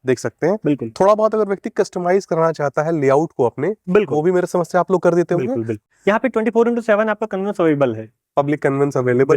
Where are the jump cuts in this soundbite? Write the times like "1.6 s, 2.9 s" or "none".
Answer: 5.8 s

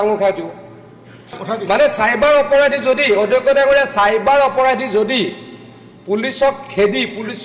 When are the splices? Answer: 1.3 s

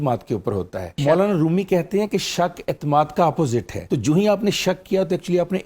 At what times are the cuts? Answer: 1.0 s, 3.8 s

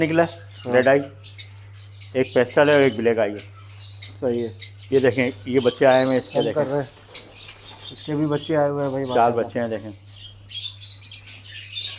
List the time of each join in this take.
4.8 s

